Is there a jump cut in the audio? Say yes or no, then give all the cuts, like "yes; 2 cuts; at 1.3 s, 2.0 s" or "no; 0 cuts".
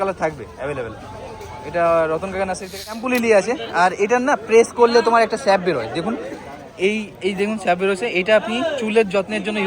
yes; 1 cut; at 3.0 s